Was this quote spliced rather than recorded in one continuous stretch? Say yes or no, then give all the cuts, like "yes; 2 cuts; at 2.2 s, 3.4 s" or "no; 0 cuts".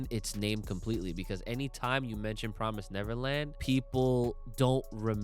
yes; 1 cut; at 3.6 s